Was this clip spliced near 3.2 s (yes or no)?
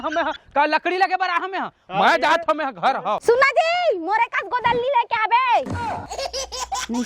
yes